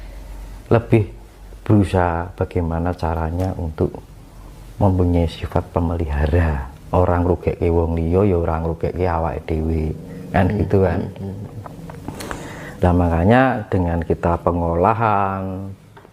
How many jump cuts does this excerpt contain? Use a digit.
0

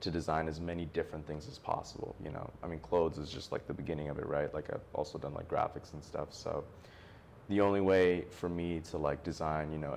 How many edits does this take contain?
0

